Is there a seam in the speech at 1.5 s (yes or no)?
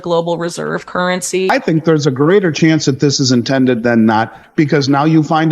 yes